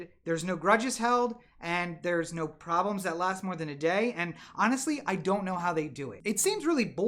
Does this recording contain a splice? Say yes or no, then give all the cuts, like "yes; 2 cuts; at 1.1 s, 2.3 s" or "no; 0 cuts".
yes; 1 cut; at 6.1 s